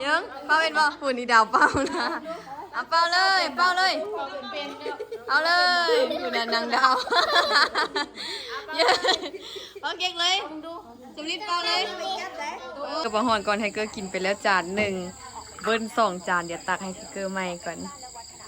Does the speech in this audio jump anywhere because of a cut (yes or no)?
yes